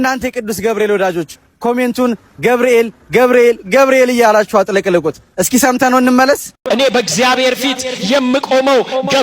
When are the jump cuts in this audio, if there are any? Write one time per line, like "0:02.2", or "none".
0:06.5